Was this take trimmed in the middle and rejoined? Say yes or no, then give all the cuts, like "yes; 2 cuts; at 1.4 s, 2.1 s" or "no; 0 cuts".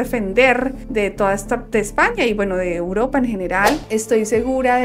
yes; 1 cut; at 3.8 s